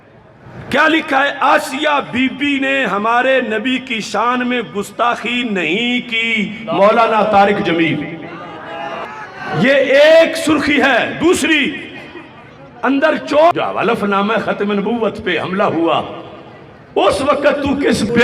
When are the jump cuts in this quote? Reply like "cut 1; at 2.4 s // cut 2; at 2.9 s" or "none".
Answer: cut 1; at 13.5 s